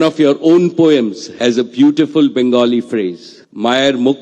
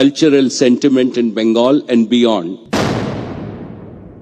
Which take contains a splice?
second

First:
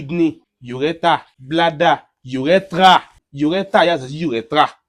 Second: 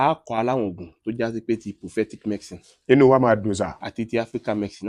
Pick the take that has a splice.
first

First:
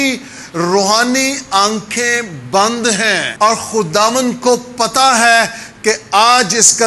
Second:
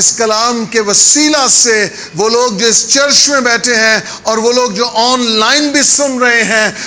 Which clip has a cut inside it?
first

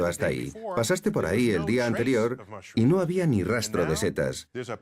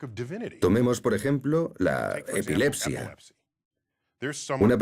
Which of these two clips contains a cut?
second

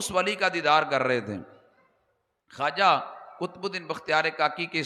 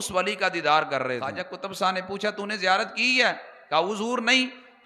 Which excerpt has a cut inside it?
second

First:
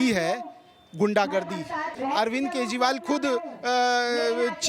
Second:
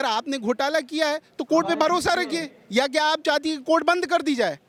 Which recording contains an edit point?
first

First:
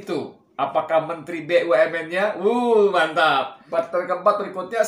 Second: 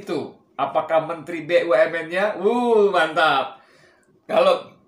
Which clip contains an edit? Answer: first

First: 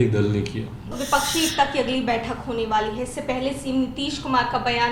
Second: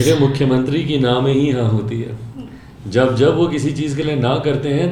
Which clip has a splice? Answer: first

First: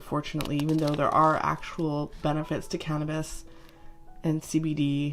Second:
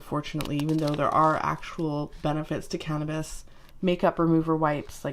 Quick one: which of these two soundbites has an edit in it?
second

